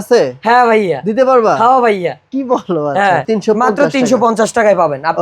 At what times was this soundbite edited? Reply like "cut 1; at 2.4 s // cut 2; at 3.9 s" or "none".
cut 1; at 3.2 s